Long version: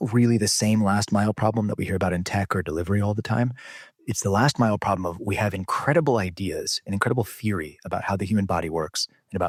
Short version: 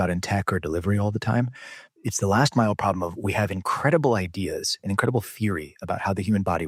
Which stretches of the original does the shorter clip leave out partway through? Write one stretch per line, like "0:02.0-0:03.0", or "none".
none